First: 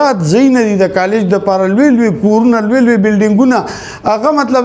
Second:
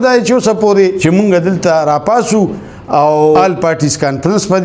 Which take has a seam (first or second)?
second